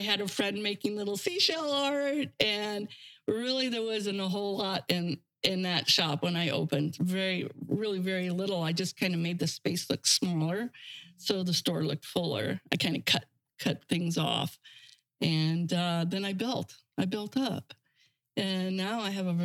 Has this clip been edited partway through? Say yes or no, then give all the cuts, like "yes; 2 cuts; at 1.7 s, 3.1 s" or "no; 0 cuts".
no; 0 cuts